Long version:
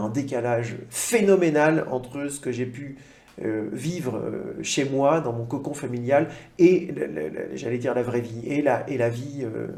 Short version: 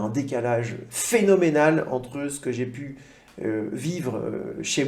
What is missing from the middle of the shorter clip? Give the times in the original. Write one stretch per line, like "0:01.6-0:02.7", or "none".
none